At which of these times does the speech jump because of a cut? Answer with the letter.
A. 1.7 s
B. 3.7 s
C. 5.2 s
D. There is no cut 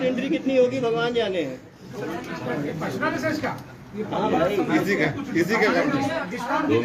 D